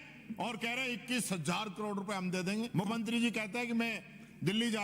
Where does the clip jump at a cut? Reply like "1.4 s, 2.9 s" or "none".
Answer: 2.8 s